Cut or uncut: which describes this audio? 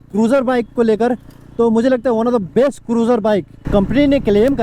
cut